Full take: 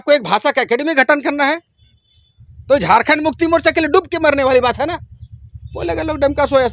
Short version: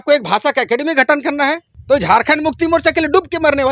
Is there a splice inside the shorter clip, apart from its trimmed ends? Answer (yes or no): yes